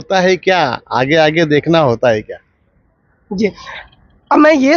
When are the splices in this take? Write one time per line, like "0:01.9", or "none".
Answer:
none